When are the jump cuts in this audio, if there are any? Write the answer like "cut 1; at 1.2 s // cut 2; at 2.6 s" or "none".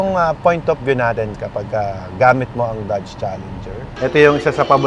cut 1; at 4.0 s

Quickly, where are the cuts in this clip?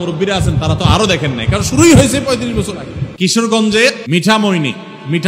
cut 1; at 3.1 s

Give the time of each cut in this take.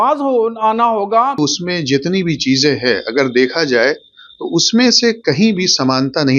cut 1; at 1.4 s

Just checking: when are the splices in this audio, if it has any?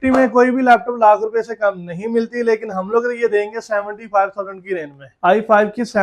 cut 1; at 5.1 s

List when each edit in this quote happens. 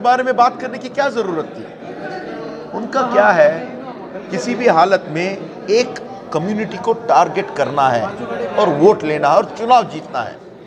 none

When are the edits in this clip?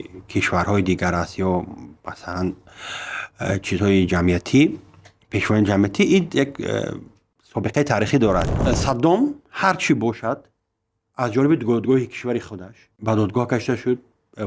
cut 1; at 8.5 s

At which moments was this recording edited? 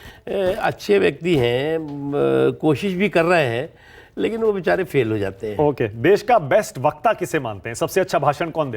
none

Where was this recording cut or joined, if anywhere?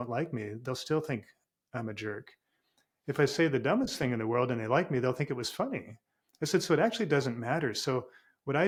none

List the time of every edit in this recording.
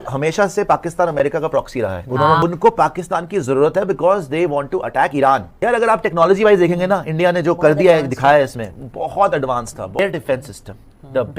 cut 1; at 2.4 s // cut 2; at 5.5 s // cut 3; at 10.0 s

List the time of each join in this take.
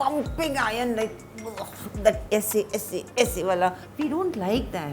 cut 1; at 2.2 s // cut 2; at 3.9 s

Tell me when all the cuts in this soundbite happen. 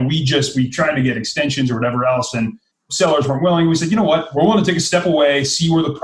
cut 1; at 2.9 s // cut 2; at 4.3 s

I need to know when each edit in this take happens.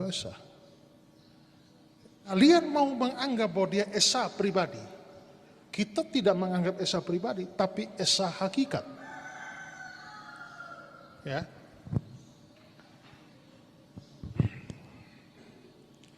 cut 1; at 2.4 s

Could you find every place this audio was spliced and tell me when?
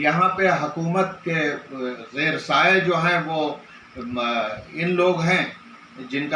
cut 1; at 2.0 s

